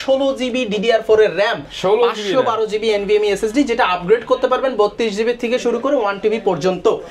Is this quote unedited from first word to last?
yes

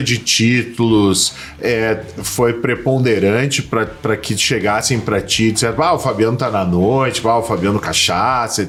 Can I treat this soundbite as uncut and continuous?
yes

